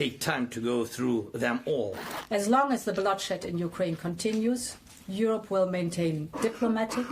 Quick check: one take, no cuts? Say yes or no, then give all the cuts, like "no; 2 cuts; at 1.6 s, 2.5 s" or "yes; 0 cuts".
no; 1 cut; at 2.1 s